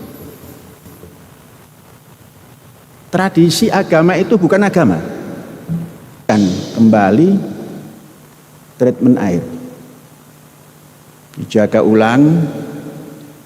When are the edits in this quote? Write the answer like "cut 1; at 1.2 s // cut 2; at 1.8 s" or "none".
cut 1; at 6.3 s